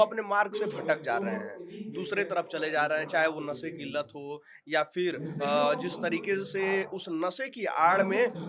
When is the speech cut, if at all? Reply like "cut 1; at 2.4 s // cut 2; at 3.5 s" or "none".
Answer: none